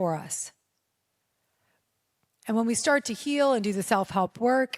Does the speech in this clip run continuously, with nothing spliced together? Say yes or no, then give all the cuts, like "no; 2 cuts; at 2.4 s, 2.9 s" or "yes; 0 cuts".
yes; 0 cuts